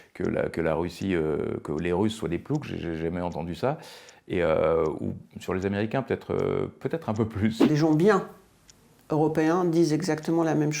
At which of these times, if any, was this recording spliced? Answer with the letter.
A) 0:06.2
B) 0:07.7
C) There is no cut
B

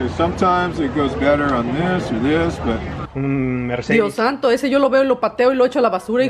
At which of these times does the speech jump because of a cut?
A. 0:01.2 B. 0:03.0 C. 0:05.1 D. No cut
B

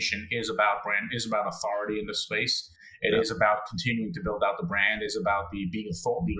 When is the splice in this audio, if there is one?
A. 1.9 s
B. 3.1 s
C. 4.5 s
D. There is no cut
D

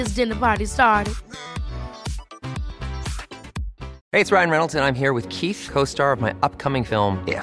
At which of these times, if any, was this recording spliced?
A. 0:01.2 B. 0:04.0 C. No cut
B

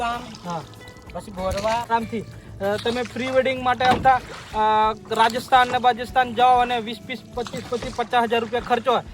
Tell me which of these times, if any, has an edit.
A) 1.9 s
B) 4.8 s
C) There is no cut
A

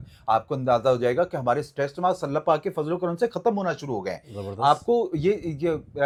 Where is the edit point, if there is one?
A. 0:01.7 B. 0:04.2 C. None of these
C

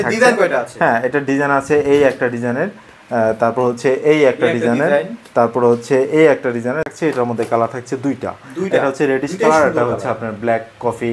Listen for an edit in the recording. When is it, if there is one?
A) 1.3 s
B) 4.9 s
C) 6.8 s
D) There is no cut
C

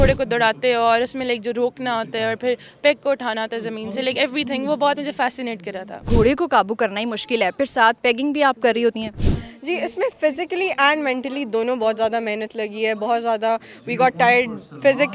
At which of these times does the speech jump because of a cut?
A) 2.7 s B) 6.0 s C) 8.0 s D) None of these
B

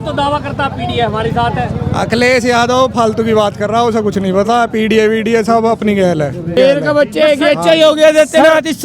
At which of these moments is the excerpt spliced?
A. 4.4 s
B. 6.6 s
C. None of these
B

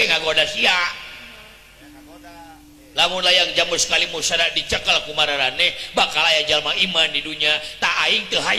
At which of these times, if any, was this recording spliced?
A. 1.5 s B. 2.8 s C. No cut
C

